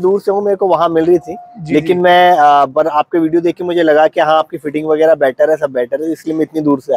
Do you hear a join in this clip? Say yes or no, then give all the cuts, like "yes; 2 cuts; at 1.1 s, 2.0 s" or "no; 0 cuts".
no; 0 cuts